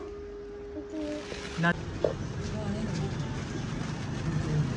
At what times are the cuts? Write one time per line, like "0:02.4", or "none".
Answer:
0:01.7